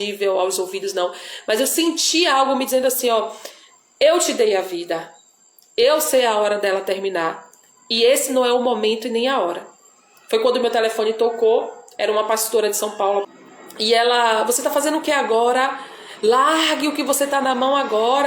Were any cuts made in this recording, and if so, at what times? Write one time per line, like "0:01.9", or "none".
0:13.3